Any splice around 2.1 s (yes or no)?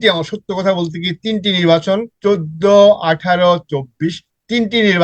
yes